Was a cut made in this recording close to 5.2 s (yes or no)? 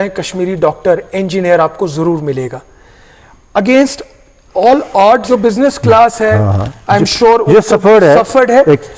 yes